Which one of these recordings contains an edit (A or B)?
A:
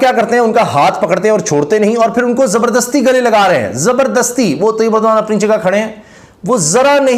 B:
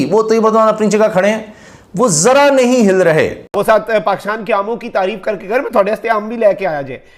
B